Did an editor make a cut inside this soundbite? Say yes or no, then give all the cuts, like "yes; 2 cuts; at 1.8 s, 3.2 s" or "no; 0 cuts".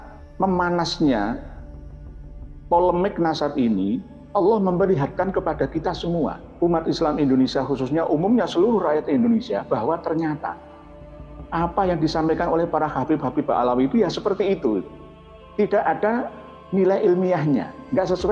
no; 0 cuts